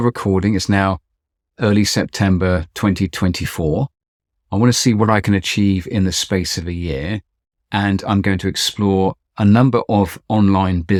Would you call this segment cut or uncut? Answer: uncut